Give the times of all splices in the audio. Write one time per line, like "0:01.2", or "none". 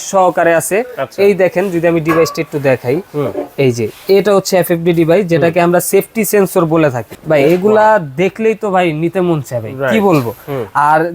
0:07.1